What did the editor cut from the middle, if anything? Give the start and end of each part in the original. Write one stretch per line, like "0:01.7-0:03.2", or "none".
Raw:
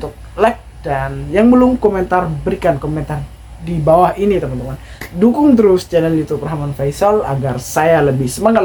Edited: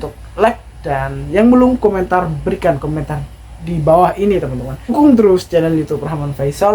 0:04.9-0:05.3